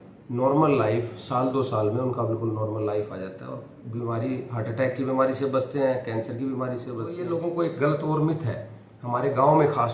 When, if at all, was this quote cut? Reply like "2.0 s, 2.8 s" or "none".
7.2 s